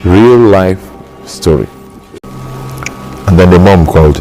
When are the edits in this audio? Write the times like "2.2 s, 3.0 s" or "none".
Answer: 2.2 s